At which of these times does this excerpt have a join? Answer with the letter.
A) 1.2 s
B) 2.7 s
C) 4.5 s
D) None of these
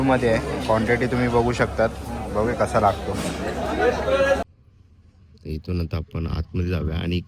C